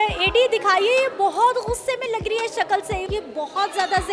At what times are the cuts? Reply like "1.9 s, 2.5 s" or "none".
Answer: 3.1 s